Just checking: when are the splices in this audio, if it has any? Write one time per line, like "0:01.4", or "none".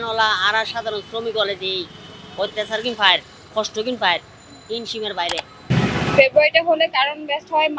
0:05.7